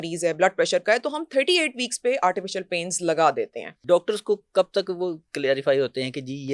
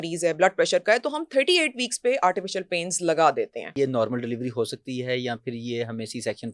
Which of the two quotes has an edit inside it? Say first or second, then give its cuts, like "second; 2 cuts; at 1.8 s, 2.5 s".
second; 1 cut; at 3.6 s